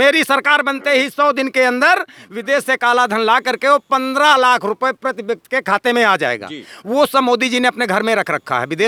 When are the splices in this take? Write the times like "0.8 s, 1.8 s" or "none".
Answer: none